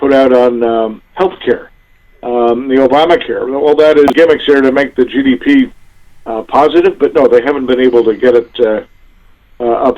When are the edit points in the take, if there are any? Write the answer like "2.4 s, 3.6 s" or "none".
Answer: 4.1 s